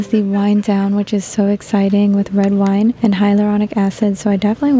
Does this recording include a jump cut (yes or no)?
yes